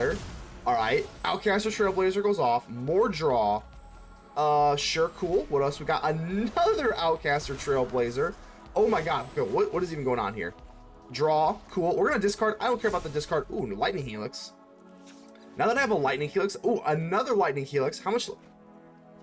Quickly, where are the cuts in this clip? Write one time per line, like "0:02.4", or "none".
none